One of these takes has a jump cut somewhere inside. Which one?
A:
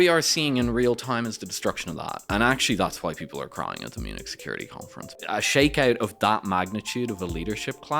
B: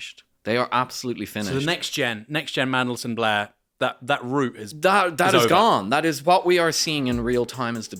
A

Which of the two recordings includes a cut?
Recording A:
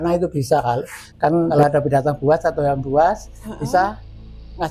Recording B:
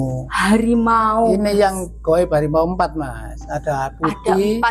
A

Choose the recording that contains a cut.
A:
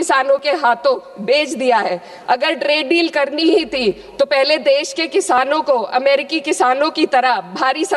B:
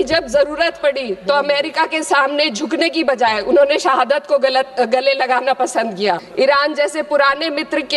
B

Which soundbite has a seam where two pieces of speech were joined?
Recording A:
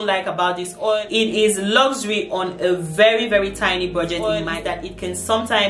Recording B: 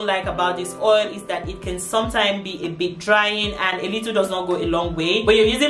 A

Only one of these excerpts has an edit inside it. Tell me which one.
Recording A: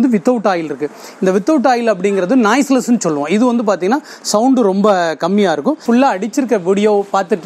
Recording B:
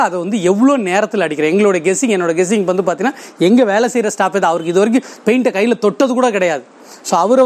A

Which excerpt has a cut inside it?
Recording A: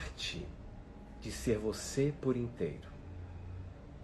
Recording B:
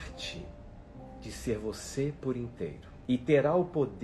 B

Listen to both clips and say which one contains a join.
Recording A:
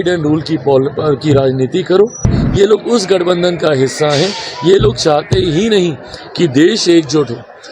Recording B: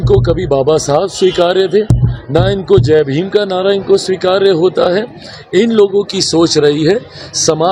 A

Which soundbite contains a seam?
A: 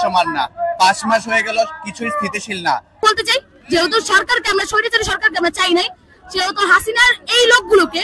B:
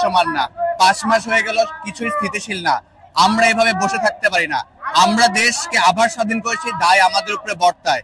A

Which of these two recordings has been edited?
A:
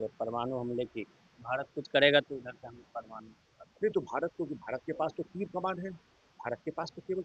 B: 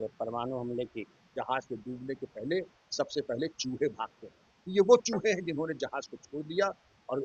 B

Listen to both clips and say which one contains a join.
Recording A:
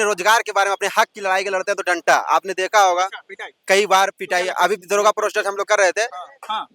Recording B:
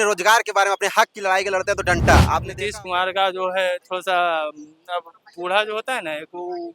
B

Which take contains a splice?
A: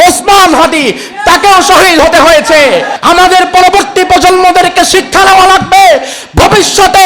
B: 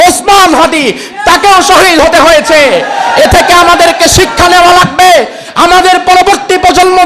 A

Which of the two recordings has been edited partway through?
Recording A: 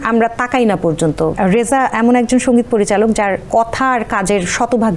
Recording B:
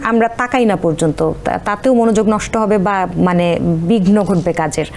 A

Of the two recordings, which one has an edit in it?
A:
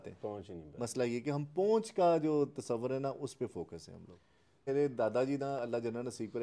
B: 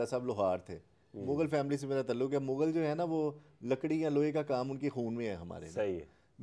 A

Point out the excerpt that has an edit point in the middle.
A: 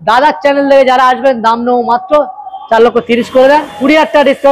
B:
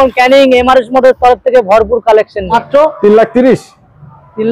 B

